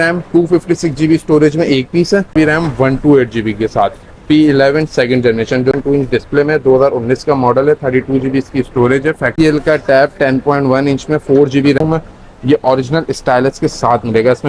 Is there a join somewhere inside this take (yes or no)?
yes